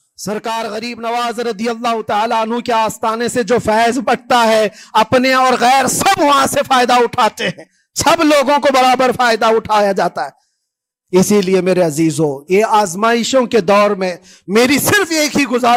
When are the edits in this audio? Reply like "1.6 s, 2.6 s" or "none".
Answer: none